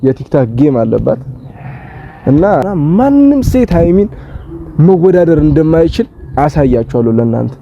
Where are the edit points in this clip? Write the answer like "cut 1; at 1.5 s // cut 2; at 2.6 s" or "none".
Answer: cut 1; at 2.6 s